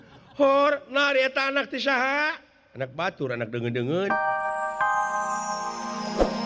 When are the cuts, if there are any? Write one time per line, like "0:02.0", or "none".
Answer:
0:04.2